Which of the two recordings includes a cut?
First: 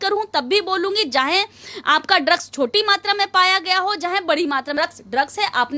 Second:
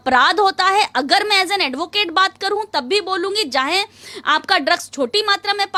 first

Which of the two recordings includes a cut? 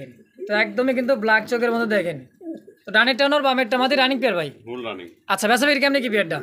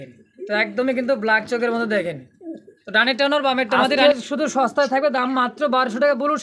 second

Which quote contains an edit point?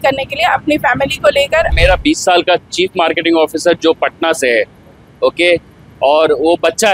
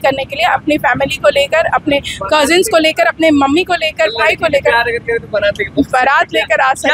first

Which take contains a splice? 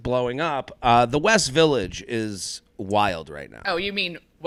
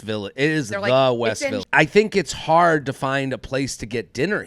second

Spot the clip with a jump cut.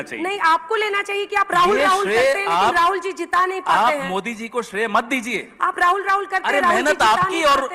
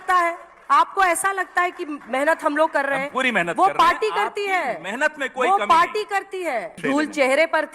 second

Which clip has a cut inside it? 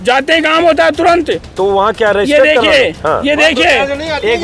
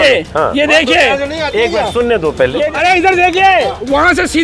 second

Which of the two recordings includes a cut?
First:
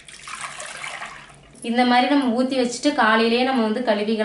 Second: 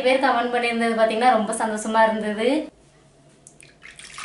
second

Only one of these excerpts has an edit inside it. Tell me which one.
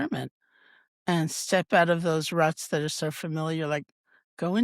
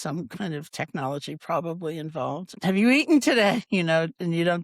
second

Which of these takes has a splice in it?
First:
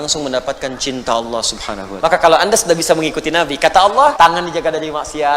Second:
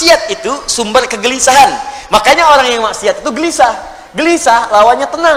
first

